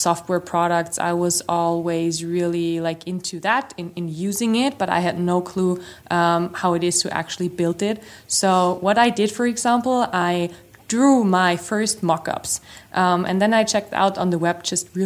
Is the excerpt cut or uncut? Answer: uncut